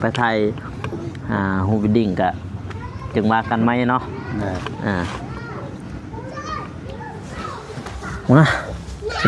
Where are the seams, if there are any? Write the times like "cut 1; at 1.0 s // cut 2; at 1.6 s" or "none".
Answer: none